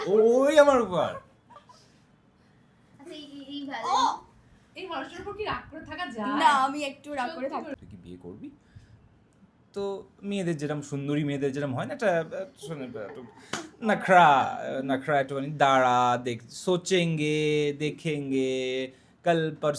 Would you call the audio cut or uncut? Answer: cut